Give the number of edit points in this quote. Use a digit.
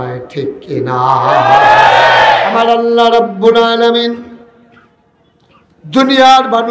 1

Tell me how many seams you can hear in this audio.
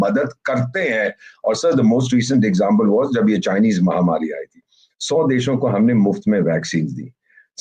0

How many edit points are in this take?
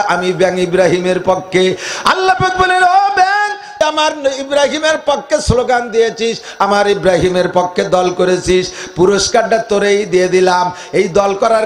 1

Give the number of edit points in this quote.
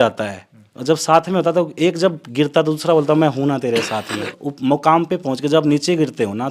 1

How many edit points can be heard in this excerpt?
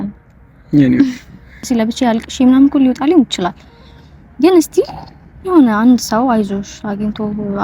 1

